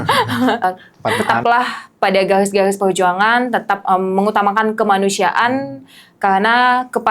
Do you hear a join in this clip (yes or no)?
yes